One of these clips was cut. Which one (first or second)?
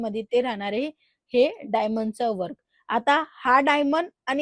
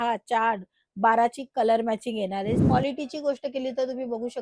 second